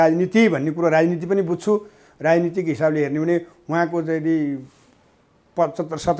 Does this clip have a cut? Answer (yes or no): no